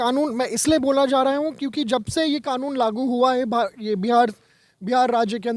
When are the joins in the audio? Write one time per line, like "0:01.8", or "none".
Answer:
none